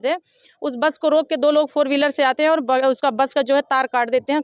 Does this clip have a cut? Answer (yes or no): no